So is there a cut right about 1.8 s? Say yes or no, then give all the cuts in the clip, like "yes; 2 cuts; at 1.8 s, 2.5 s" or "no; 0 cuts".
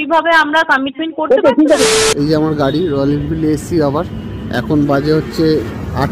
yes; 1 cut; at 1.8 s